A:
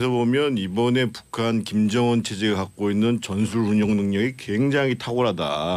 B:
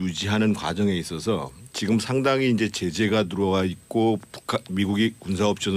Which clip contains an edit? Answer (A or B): B